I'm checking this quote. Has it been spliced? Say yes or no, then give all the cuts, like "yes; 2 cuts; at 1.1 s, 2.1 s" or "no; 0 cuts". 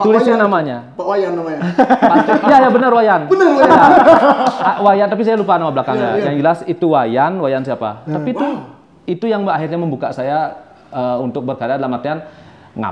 no; 0 cuts